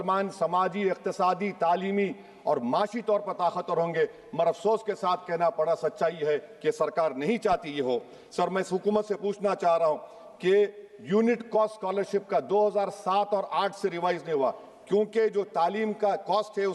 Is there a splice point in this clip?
no; 0 cuts

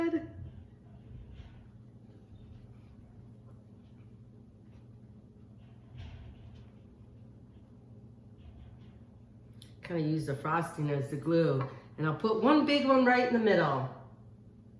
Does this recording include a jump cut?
no; 0 cuts

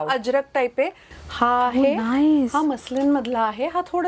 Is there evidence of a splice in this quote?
yes; 1 cut; at 1.1 s

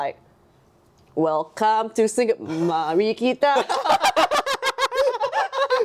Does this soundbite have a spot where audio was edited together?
no; 0 cuts

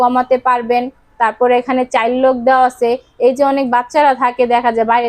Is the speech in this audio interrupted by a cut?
no; 0 cuts

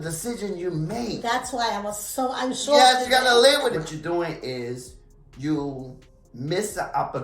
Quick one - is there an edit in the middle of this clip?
yes; 1 cut; at 3.9 s

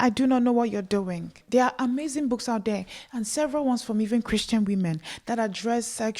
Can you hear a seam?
yes; 1 cut; at 1.4 s

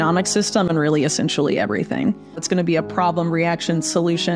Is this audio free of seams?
no; 1 cut; at 2.4 s

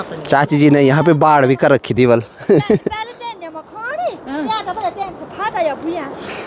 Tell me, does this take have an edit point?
no; 0 cuts

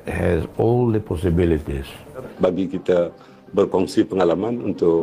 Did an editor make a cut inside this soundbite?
yes; 1 cut; at 2.3 s

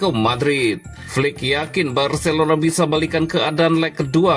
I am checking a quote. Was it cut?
yes; 1 cut; at 0.9 s

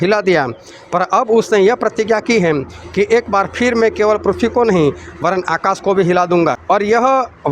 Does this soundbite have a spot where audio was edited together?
yes; 1 cut; at 6.6 s

